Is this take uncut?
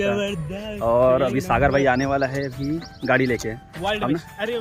yes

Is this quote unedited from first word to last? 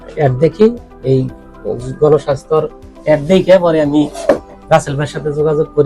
yes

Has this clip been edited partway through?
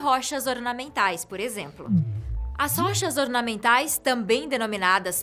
no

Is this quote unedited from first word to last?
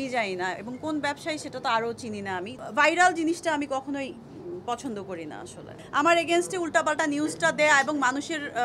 no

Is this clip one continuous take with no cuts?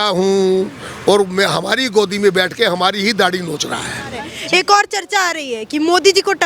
no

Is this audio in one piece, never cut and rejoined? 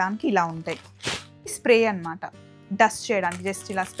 no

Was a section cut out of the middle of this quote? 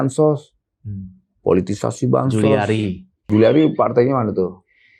yes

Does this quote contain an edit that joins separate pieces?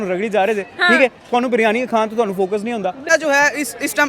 yes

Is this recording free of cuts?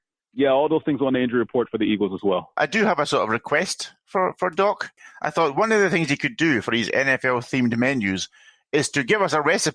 no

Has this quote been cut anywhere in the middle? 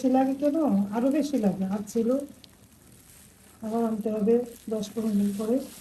no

